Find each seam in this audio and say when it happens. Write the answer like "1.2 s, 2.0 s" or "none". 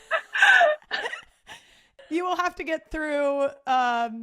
1.9 s